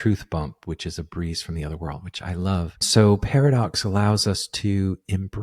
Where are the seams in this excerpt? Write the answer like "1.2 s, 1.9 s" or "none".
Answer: 2.9 s